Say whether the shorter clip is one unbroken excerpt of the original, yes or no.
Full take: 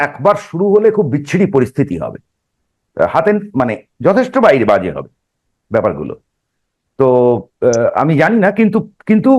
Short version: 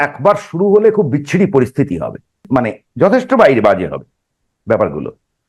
no